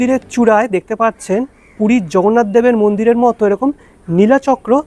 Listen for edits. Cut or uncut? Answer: uncut